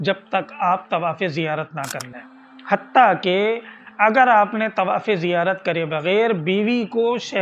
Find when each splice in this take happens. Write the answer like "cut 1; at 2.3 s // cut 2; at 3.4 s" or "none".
none